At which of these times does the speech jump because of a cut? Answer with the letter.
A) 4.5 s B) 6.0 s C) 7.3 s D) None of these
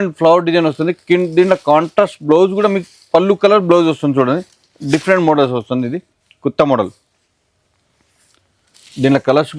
D